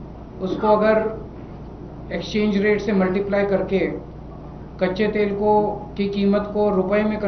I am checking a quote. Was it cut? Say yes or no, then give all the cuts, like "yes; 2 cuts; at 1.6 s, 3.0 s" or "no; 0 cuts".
no; 0 cuts